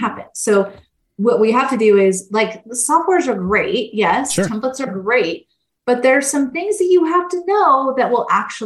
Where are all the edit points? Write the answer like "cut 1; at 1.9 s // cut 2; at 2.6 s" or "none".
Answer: none